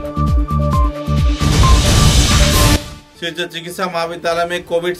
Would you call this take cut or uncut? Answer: uncut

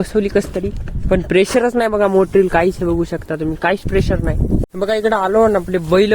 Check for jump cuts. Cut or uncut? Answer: cut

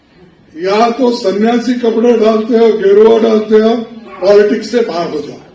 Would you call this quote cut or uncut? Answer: uncut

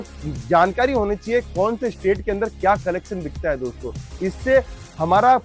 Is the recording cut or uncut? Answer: uncut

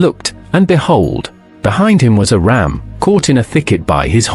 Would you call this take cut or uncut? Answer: uncut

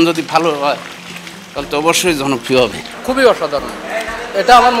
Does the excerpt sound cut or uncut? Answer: cut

